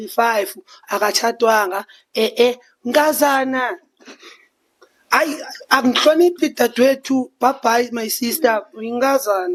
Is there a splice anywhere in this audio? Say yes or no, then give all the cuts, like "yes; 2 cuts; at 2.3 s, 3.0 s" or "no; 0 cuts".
no; 0 cuts